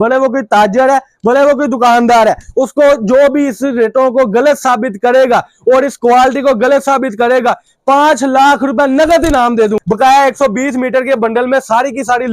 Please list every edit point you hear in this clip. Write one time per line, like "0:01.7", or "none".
0:09.8